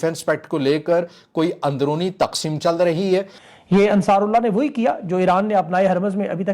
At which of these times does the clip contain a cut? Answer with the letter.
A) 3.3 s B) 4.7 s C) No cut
A